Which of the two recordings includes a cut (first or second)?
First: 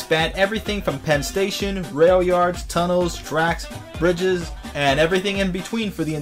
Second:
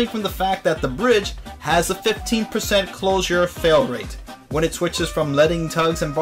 first